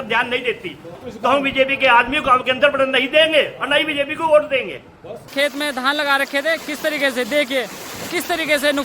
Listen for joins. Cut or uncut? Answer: cut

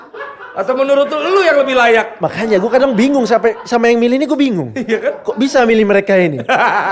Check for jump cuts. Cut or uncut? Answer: uncut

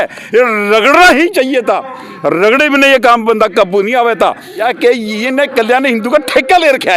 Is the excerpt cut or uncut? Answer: cut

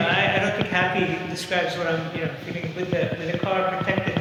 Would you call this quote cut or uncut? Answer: uncut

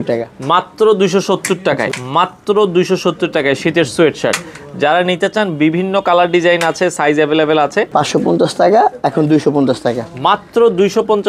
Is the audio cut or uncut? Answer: cut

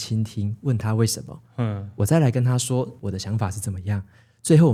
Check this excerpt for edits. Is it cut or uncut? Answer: uncut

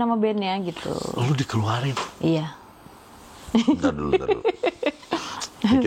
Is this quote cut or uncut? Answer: uncut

